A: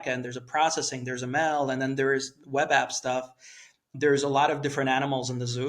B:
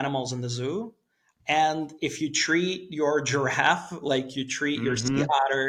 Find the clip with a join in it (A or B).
A